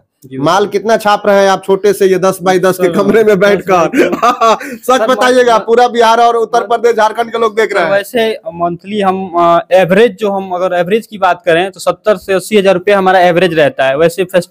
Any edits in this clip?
no; 0 cuts

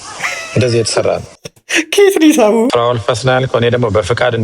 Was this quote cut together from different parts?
yes; 1 cut; at 2.7 s

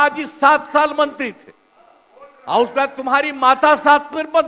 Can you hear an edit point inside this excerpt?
no; 0 cuts

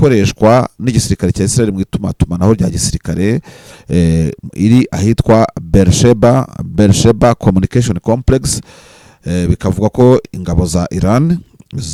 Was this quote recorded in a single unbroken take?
yes; 0 cuts

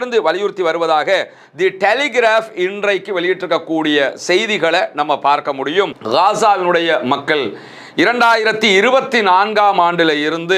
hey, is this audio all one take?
no; 1 cut; at 6.0 s

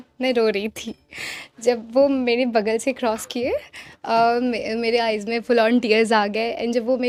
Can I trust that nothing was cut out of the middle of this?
yes; 0 cuts

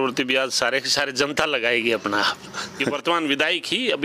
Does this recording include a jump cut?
yes; 1 cut; at 3.0 s

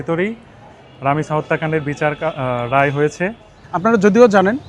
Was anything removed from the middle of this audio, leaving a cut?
yes; 1 cut; at 3.6 s

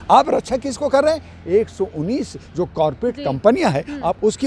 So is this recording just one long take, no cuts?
yes; 0 cuts

